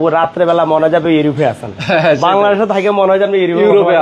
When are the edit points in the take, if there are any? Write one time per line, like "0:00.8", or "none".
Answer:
none